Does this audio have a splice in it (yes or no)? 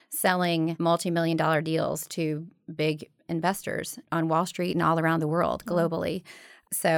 yes